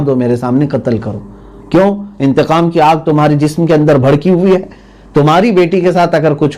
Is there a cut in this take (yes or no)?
no